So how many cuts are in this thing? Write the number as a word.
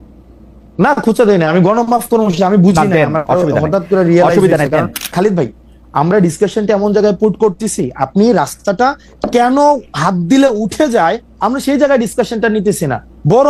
one